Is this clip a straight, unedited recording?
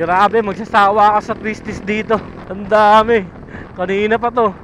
no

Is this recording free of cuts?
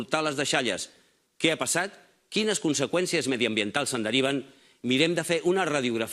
no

